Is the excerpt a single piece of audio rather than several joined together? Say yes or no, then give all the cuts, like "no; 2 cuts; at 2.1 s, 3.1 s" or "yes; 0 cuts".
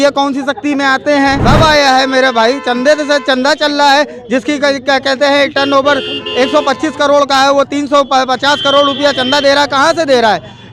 no; 1 cut; at 1.4 s